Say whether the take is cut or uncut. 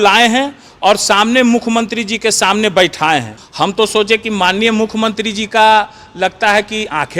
cut